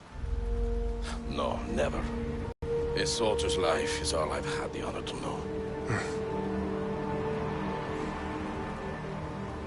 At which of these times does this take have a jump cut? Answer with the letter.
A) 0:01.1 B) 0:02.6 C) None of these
B